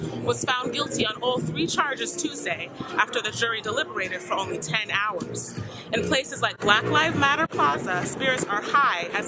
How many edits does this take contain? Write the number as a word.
zero